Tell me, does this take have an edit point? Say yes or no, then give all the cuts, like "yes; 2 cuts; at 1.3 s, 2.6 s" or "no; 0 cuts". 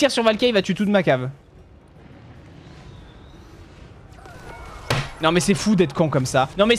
yes; 1 cut; at 1.5 s